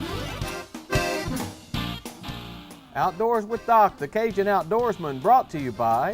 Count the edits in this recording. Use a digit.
1